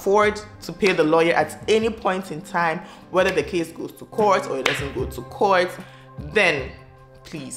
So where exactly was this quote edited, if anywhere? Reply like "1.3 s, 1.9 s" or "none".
none